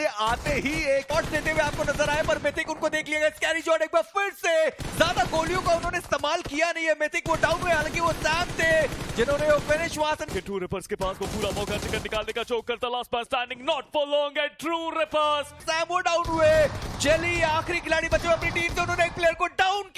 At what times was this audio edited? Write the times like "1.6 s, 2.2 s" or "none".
1.1 s, 10.3 s, 15.6 s

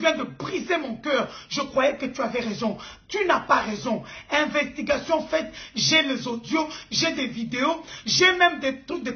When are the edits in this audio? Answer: none

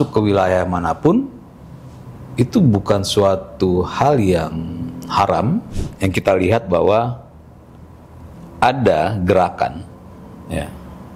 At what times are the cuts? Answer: 5.8 s

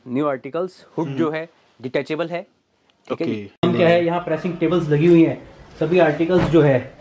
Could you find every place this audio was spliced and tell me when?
3.6 s

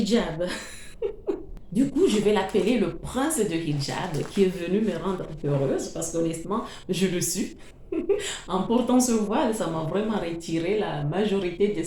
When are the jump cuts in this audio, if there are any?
1.5 s

